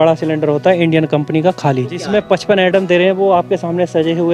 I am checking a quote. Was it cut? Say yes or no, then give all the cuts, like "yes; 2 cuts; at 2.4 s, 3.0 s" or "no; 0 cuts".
yes; 1 cut; at 2.0 s